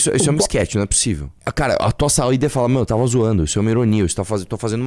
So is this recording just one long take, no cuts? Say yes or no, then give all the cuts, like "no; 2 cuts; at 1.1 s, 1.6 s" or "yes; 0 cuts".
no; 1 cut; at 1.3 s